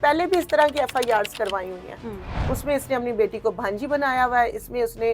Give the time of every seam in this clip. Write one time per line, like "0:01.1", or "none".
0:02.4